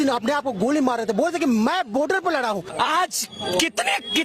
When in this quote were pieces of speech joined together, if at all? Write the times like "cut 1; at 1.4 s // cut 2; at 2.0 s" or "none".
cut 1; at 2.7 s